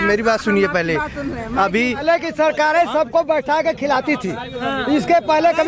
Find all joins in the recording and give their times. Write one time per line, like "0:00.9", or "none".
0:02.0